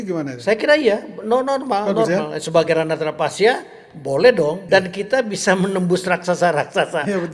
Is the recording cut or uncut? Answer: cut